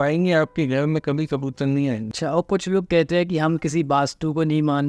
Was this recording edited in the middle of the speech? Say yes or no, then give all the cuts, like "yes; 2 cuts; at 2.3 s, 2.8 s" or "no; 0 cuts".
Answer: yes; 1 cut; at 2.1 s